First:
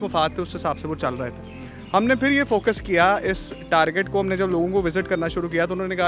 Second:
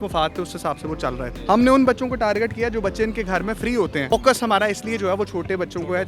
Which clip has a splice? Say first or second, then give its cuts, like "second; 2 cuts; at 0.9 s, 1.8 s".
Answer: second; 2 cuts; at 1.3 s, 4.1 s